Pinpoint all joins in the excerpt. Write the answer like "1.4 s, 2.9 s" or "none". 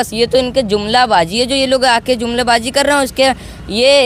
none